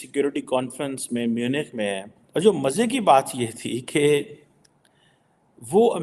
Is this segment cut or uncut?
cut